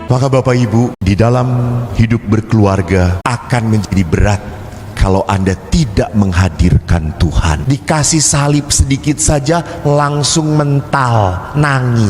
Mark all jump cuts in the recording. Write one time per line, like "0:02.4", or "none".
0:01.0
0:03.2
0:07.6